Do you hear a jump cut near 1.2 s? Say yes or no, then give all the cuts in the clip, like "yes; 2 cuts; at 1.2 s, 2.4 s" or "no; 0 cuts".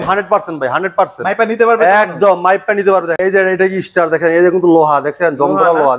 no; 1 cut; at 3.1 s